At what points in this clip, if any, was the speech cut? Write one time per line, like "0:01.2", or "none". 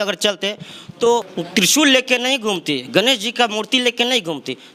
none